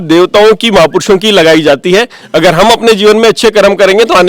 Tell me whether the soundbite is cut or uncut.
uncut